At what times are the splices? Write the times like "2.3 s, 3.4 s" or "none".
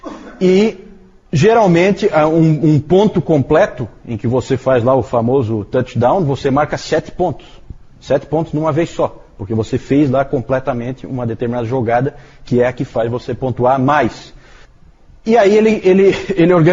12.6 s